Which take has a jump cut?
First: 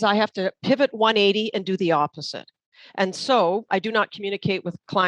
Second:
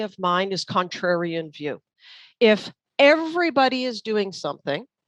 first; 1 cut; at 3.7 s

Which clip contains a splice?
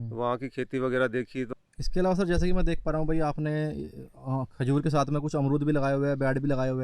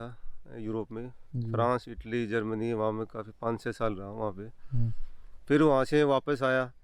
first; 1 cut; at 1.5 s

